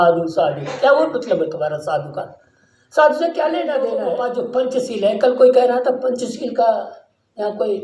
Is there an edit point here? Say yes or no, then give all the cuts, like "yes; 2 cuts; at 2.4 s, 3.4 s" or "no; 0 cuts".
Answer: yes; 1 cut; at 3.9 s